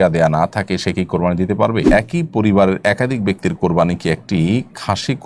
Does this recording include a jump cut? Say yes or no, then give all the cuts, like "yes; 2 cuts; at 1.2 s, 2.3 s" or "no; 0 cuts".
yes; 1 cut; at 1.8 s